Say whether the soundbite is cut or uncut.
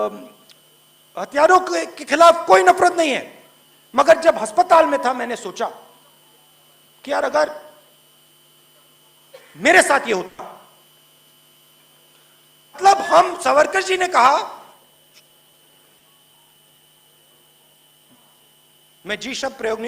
cut